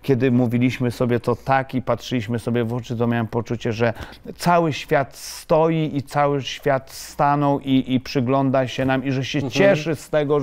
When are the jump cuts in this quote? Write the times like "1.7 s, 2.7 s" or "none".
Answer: none